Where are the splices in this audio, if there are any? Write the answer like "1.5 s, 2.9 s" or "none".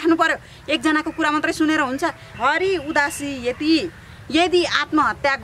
2.3 s

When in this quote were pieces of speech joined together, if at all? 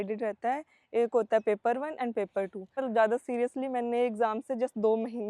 2.8 s

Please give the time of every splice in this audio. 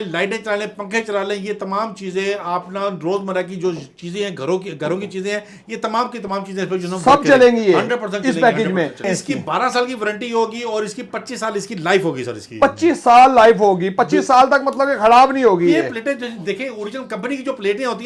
9.0 s

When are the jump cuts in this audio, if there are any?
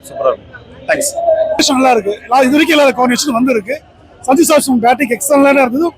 1.6 s

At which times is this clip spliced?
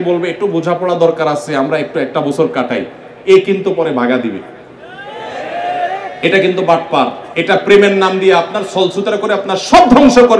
7.2 s

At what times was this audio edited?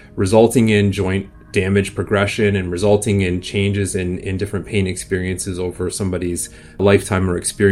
6.8 s

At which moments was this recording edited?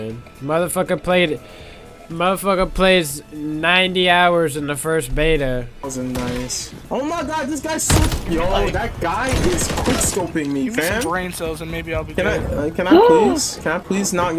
5.8 s

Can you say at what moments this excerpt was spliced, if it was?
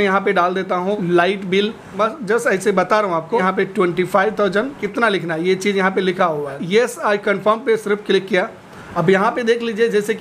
1.0 s, 1.9 s, 3.4 s, 4.8 s, 6.6 s, 8.8 s

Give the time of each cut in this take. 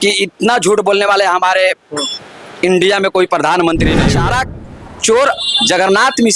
4.0 s

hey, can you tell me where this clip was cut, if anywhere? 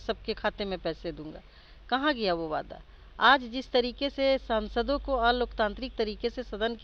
none

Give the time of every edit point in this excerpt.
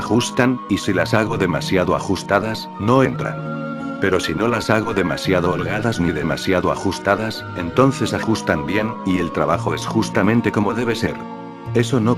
5.1 s

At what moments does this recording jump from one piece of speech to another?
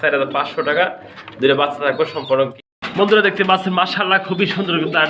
2.6 s

